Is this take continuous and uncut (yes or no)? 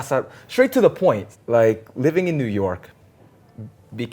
no